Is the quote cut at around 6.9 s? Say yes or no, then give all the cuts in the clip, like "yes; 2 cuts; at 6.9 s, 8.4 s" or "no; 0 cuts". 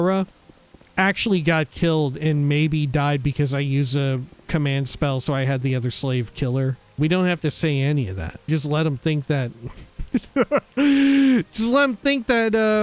yes; 2 cuts; at 6.9 s, 8.5 s